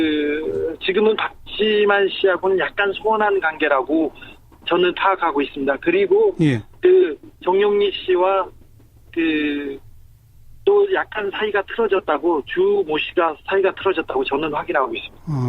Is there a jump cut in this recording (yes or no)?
yes